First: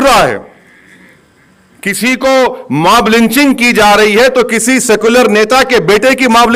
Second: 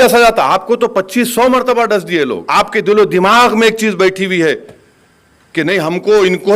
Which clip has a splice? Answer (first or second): second